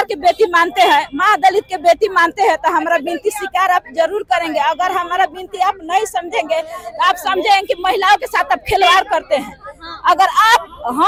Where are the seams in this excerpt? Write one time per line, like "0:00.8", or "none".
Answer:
none

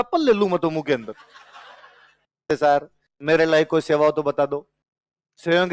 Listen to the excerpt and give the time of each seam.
0:02.4

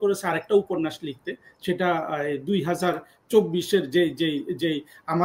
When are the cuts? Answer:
none

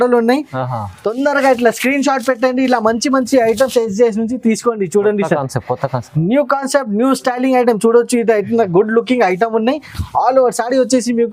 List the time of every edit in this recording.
none

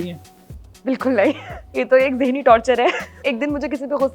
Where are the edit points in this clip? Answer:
0:01.6
0:03.2

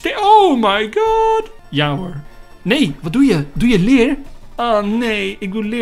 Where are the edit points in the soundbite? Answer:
0:01.6

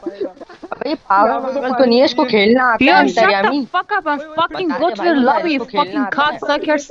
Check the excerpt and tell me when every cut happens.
none

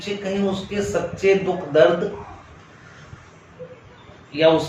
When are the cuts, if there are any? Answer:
none

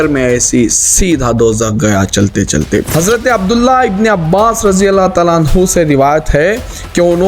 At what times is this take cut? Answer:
0:02.9

